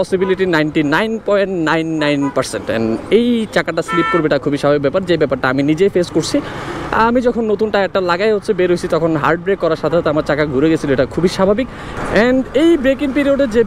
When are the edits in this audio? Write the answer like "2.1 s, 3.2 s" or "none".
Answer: none